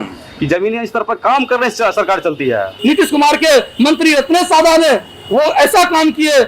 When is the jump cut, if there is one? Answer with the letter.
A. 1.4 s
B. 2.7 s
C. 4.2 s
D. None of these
B